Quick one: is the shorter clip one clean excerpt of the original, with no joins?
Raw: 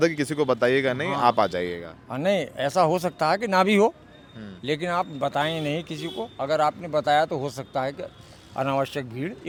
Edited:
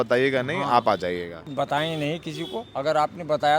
no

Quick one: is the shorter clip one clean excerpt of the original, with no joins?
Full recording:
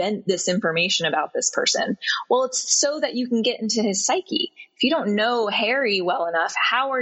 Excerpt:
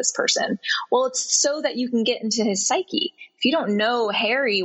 yes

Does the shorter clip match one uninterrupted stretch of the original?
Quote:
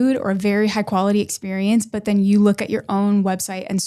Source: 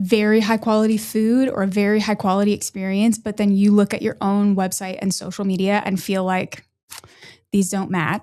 yes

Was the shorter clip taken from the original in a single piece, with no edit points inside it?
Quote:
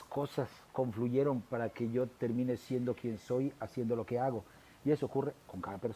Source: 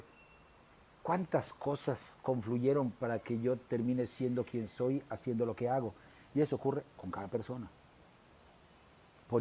yes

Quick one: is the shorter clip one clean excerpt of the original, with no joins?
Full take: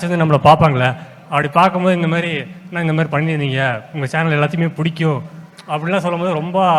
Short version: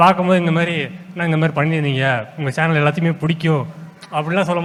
yes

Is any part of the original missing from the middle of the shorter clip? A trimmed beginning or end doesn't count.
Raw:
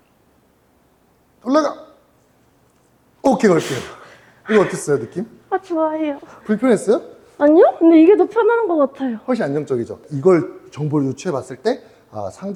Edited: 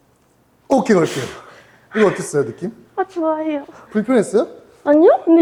no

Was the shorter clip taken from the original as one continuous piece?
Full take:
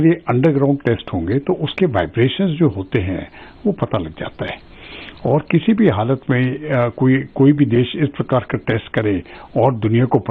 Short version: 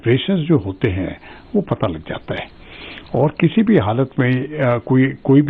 yes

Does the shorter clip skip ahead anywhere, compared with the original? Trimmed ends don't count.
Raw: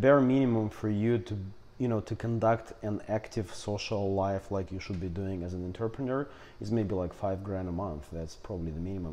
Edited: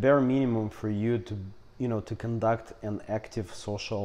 no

